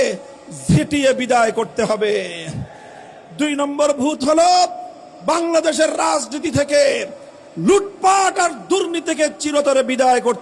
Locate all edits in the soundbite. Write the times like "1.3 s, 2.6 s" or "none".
none